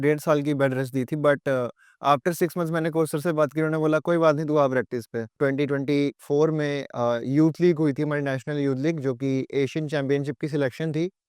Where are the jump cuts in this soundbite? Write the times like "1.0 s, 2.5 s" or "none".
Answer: 5.4 s